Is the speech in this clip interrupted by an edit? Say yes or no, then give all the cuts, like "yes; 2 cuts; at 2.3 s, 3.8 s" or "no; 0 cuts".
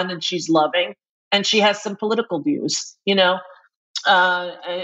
no; 0 cuts